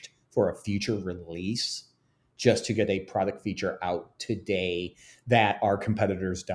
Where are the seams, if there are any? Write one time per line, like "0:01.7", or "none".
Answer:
none